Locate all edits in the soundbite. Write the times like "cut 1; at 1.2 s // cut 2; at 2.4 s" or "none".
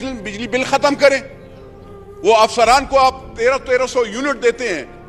none